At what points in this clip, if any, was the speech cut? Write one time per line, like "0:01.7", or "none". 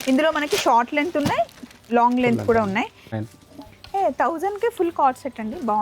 0:03.2